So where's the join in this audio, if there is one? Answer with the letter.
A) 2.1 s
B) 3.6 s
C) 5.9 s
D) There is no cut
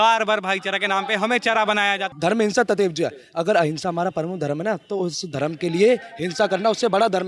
A